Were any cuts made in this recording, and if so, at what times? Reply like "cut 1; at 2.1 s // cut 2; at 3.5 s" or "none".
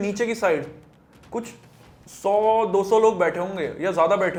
none